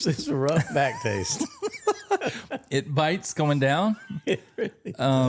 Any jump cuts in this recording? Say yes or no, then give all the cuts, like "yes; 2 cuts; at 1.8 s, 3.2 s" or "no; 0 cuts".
no; 0 cuts